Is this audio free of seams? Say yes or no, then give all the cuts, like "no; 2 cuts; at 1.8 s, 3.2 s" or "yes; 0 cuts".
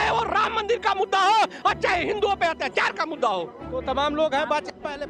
yes; 0 cuts